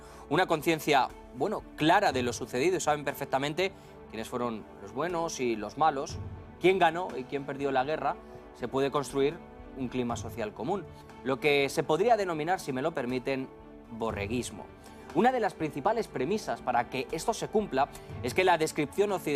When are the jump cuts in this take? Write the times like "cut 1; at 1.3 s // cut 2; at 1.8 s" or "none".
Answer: none